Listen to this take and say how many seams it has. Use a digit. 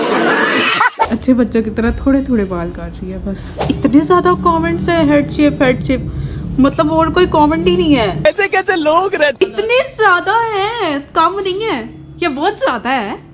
3